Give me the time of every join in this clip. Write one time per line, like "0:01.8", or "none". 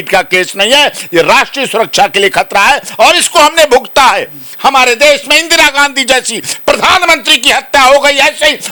none